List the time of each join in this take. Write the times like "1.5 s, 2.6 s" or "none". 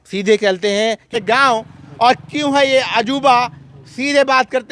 1.2 s